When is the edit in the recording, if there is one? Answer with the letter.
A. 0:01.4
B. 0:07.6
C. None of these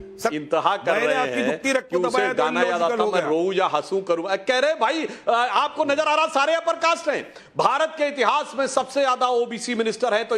B